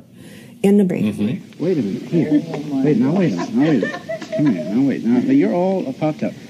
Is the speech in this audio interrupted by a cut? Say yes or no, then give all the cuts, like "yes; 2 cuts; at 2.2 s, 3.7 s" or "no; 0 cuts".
no; 0 cuts